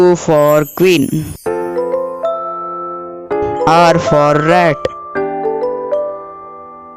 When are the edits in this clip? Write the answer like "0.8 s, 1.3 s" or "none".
none